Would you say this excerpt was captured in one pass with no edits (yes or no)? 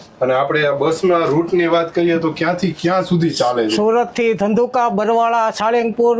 yes